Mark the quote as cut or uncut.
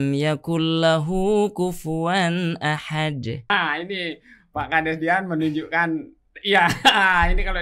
cut